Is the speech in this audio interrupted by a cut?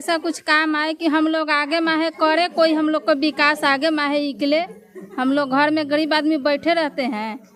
no; 0 cuts

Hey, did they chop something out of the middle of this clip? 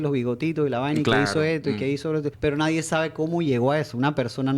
yes; 1 cut; at 2.3 s

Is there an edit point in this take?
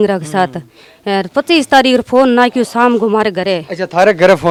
no; 0 cuts

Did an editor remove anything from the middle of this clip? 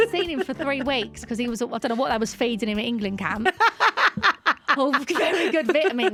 no; 0 cuts

